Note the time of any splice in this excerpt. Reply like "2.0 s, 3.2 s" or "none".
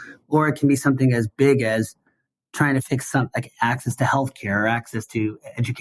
2.9 s

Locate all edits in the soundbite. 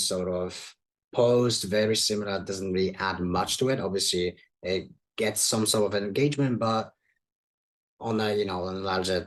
none

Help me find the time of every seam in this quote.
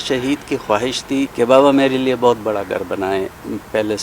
1.3 s

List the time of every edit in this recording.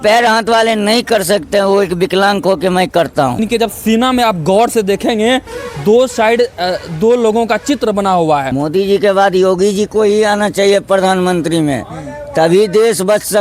3.4 s, 8.5 s

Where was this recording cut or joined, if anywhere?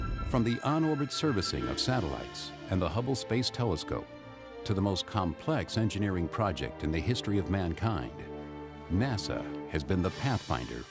5.2 s

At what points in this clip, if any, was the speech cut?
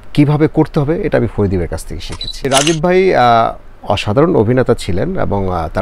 2.5 s

